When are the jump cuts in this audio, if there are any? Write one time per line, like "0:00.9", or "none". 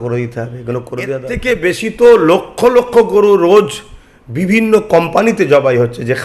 0:01.3

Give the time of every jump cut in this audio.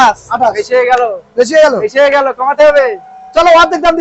none

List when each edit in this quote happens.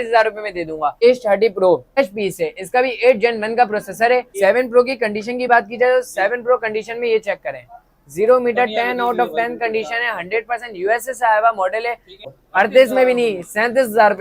0:00.9
0:02.0
0:04.3
0:12.3

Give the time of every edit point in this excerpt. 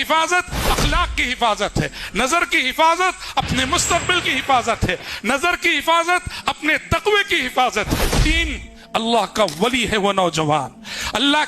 0:08.3

